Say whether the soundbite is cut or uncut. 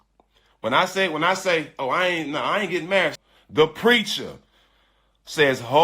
cut